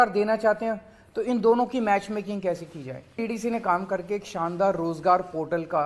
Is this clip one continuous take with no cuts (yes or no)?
no